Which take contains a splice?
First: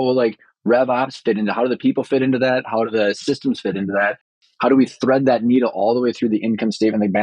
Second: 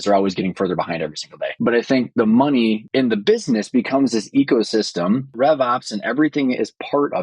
second; 3 cuts; at 1.4 s, 2.8 s, 5.3 s

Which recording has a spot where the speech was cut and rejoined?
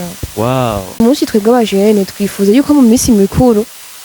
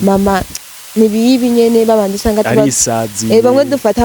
first; 1 cut; at 1.0 s

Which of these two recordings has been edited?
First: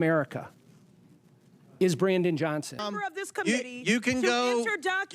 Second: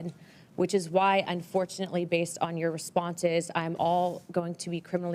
first; 1 cut; at 2.8 s

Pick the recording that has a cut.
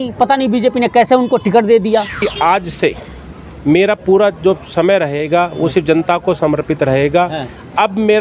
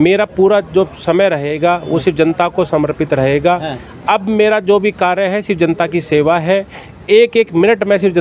first; 1 cut; at 2.2 s

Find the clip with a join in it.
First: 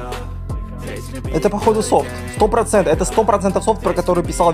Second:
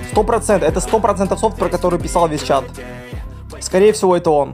first; 1 cut; at 1.3 s

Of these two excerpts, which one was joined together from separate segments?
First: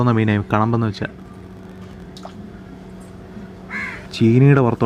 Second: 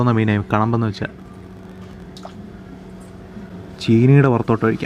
second; 1 cut; at 3.6 s

